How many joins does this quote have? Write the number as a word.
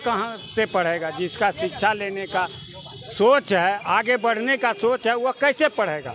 zero